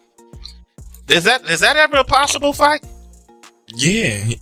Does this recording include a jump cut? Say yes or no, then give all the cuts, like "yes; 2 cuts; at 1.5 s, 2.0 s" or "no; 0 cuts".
no; 0 cuts